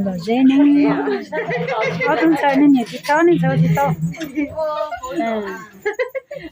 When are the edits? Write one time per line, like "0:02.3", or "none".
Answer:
0:01.0